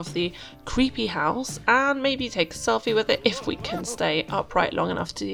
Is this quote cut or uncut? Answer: uncut